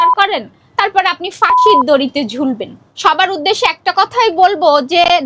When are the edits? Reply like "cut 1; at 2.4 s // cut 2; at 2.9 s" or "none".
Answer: cut 1; at 2.8 s

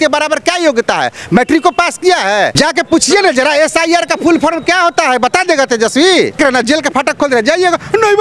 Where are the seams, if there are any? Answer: cut 1; at 2.5 s // cut 2; at 6.4 s

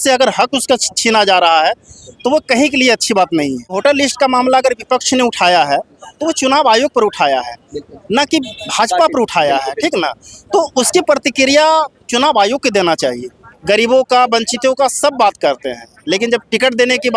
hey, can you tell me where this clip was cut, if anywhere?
cut 1; at 3.8 s // cut 2; at 13.5 s

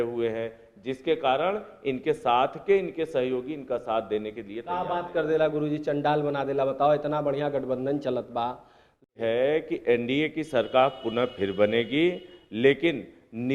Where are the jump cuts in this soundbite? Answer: cut 1; at 9.1 s

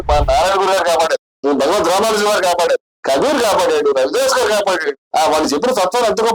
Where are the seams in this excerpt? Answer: cut 1; at 1.3 s // cut 2; at 2.9 s // cut 3; at 5.0 s

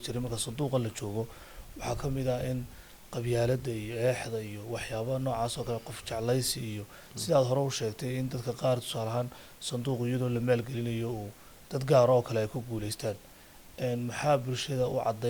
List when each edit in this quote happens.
none

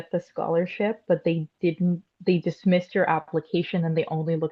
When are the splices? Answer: none

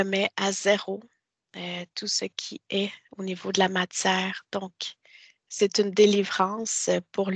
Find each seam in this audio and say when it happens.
none

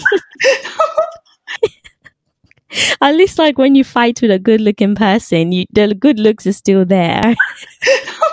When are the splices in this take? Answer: cut 1; at 1.5 s // cut 2; at 7.2 s

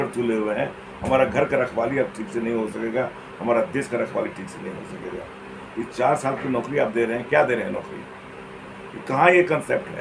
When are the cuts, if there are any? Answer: none

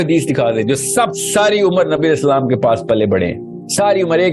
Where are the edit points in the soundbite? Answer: none

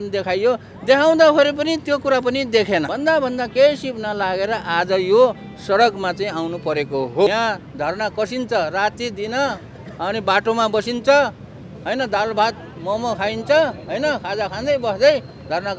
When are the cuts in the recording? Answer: cut 1; at 2.9 s // cut 2; at 7.3 s

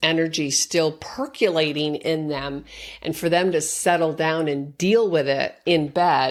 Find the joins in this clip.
none

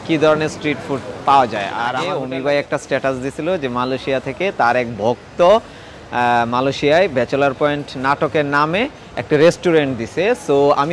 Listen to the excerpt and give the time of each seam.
cut 1; at 2.1 s

